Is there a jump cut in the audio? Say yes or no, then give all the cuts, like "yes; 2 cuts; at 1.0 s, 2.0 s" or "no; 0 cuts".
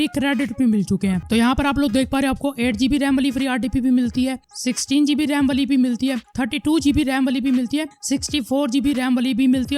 yes; 1 cut; at 1.2 s